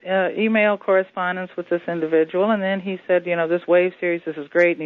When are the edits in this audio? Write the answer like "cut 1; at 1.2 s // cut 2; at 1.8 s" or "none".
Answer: none